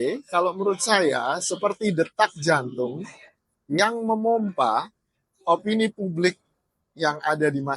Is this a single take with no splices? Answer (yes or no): yes